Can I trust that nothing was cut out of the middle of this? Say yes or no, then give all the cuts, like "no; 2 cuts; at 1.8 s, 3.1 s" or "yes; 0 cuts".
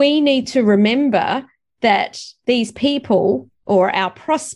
yes; 0 cuts